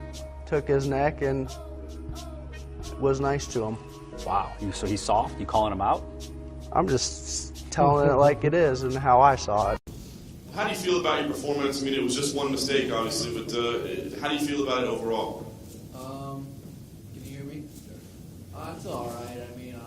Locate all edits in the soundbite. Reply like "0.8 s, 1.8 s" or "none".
1.6 s